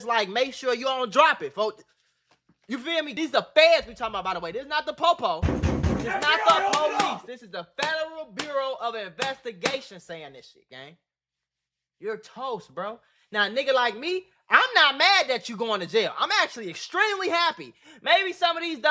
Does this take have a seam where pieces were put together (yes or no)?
yes